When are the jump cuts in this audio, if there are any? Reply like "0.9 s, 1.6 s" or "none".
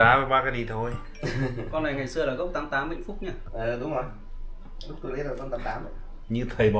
none